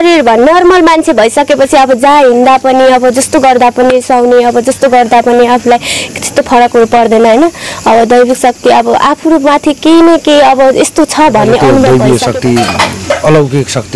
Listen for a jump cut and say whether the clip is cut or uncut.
cut